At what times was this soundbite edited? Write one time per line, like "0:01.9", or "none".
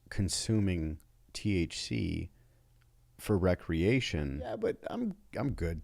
0:04.6